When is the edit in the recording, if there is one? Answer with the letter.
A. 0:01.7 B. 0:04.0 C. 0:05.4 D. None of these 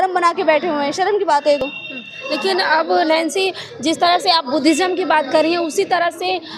D